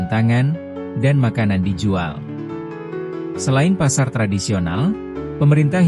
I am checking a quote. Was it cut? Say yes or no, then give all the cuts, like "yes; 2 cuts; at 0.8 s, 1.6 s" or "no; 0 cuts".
yes; 2 cuts; at 2.2 s, 3.4 s